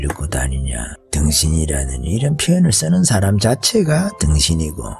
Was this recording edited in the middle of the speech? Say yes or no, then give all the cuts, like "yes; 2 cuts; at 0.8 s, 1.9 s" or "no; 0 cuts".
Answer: yes; 1 cut; at 1.0 s